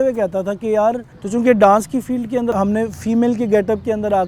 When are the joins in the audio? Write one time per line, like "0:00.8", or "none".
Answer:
0:01.1
0:02.5

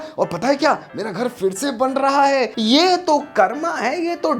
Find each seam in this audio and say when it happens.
0:02.5

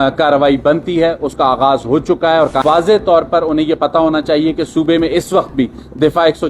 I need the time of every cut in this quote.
0:02.6

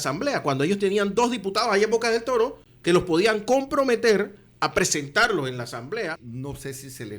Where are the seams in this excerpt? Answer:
0:02.7
0:06.3

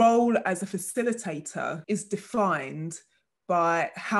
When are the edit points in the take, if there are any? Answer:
0:01.8

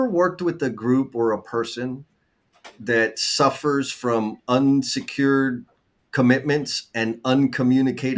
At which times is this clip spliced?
none

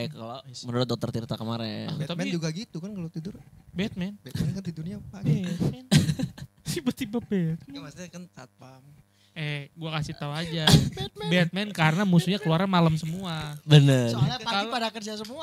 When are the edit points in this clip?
none

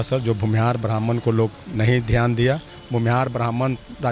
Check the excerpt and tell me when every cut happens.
0:02.7

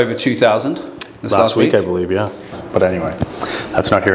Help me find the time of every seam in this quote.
0:02.6

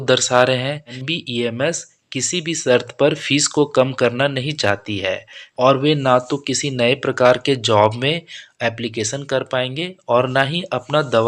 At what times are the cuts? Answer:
0:01.1
0:05.4

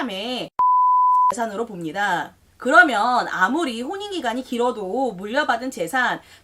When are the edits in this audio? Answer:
0:02.4

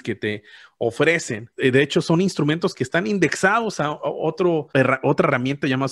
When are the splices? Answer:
0:01.5
0:04.7

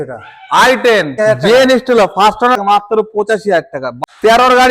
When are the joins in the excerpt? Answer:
0:01.1
0:02.6
0:03.9

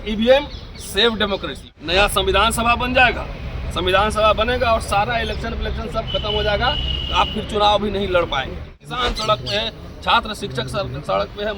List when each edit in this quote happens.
0:01.6
0:08.9

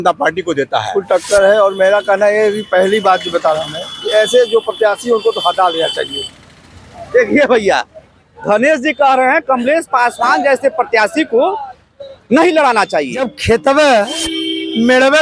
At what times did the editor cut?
0:01.0
0:13.3

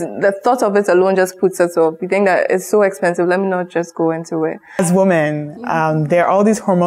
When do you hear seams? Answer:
0:04.8

